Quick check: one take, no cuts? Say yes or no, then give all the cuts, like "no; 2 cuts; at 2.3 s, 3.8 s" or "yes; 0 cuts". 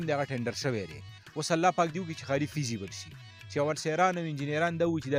yes; 0 cuts